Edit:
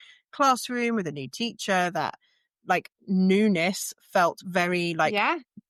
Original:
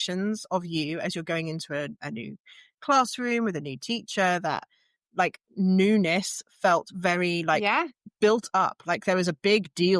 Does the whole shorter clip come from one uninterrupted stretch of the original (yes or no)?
yes